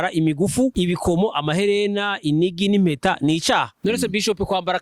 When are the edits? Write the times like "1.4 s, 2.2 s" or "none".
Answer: 0.7 s, 3.7 s